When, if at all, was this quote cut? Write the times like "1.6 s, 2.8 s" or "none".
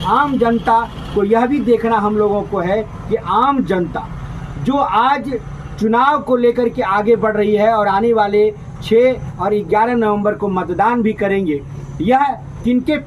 none